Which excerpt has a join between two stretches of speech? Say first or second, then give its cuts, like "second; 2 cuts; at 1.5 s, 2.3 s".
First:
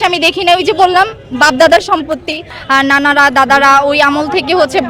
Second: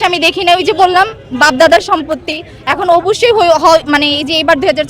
first; 1 cut; at 2.5 s